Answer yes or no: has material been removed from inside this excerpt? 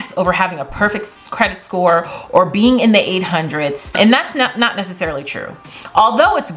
no